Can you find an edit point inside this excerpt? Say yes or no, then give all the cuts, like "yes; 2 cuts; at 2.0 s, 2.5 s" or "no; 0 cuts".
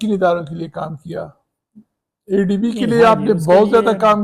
no; 0 cuts